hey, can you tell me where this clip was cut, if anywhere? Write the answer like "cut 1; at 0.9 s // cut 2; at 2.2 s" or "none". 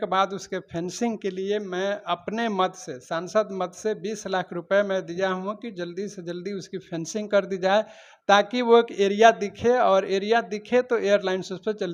none